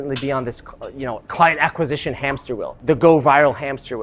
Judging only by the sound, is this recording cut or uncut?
cut